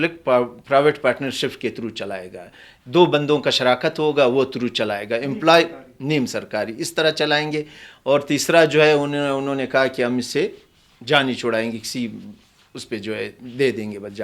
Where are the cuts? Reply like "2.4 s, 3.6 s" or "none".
none